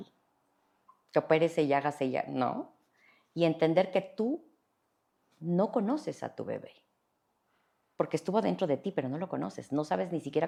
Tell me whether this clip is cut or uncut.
uncut